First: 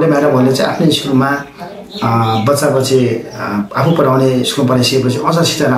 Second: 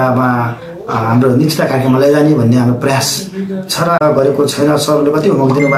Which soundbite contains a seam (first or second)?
second